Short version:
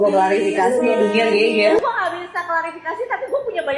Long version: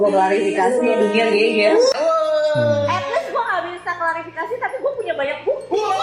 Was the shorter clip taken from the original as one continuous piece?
no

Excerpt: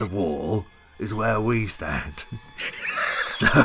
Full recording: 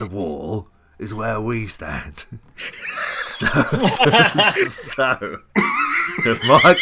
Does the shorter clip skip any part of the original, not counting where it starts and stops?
no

